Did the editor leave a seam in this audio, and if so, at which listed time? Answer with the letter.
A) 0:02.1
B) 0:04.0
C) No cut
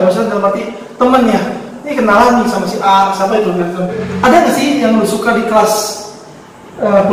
B